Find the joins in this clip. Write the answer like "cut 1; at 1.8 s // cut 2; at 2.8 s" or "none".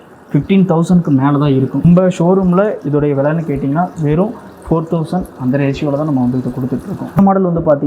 cut 1; at 1.8 s // cut 2; at 7.2 s